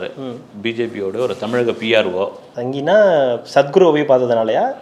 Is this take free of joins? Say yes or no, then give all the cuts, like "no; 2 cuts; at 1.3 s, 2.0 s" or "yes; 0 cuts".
yes; 0 cuts